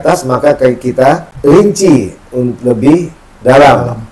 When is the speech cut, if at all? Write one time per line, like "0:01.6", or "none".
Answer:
0:01.6